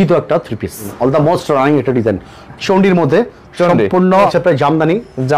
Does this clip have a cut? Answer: yes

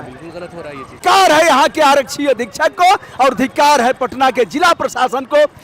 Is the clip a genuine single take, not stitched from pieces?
no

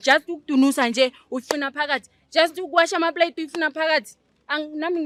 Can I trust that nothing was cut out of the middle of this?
yes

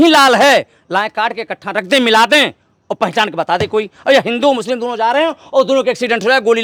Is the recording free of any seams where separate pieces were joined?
yes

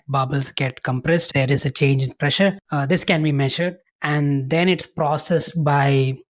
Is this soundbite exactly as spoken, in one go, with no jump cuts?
no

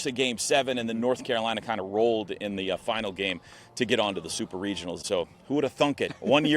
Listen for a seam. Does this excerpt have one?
yes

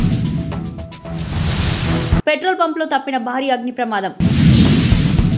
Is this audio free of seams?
yes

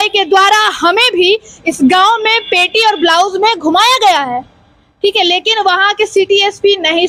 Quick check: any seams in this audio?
no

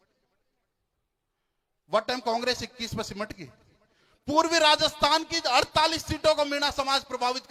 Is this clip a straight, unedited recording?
yes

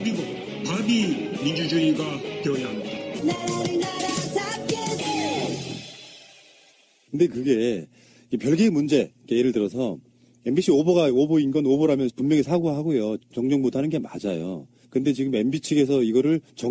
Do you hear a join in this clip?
yes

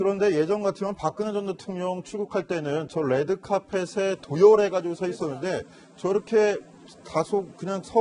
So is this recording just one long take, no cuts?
no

